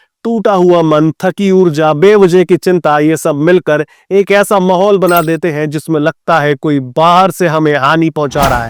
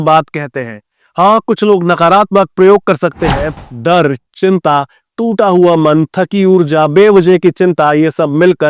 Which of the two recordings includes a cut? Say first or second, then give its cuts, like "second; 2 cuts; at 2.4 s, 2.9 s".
second; 1 cut; at 3.5 s